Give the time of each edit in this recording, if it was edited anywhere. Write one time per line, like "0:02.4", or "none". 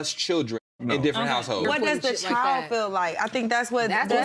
0:01.6